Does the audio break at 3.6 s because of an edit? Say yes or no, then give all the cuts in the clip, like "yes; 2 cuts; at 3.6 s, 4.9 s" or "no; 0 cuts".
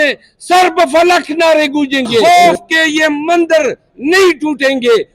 no; 1 cut; at 2.2 s